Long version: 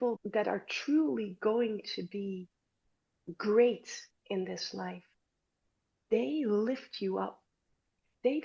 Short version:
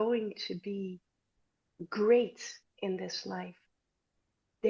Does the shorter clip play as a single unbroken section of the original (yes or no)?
yes